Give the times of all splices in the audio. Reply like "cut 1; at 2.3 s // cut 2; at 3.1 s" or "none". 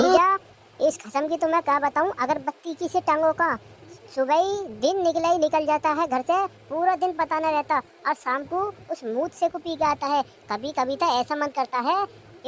none